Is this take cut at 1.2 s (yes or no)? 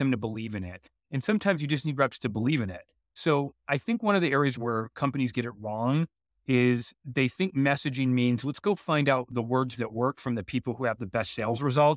no